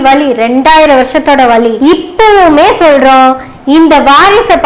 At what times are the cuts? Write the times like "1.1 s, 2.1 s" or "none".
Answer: 1.8 s